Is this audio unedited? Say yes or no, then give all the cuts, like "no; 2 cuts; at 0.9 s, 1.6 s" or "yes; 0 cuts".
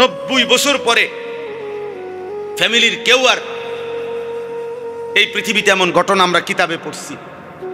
no; 2 cuts; at 1.1 s, 2.6 s